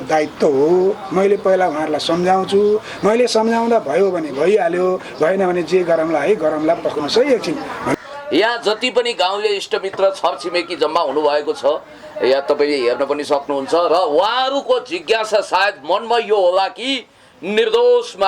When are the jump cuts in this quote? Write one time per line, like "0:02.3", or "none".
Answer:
0:07.9